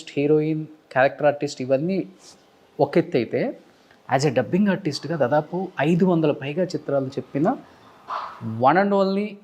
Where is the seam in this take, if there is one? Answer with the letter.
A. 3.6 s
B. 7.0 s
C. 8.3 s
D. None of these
D